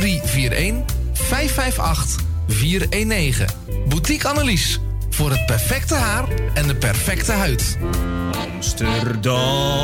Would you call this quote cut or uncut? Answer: cut